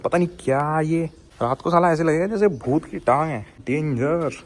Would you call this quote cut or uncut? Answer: cut